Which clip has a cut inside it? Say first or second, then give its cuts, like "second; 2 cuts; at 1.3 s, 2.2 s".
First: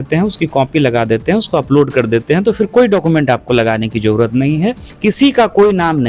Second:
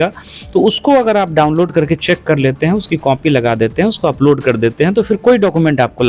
first; 1 cut; at 4.9 s